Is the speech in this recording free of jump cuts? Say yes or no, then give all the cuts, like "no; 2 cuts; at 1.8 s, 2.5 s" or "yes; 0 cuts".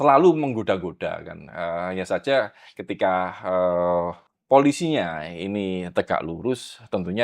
no; 1 cut; at 4.3 s